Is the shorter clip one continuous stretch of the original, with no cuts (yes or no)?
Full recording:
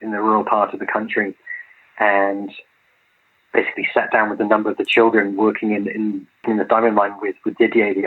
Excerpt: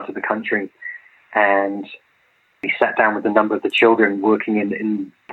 no